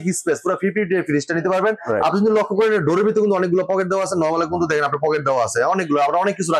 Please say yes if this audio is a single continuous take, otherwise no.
yes